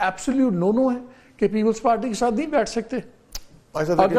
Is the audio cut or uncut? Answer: uncut